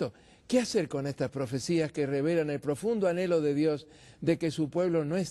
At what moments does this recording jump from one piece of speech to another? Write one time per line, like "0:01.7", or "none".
0:02.2